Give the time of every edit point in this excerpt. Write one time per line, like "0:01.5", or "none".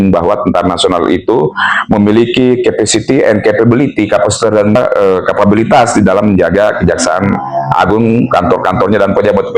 0:04.8